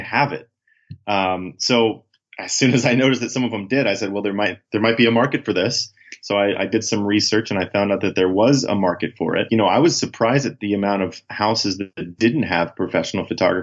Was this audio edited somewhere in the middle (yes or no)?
yes